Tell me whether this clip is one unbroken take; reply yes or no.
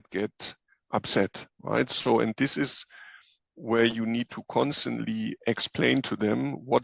yes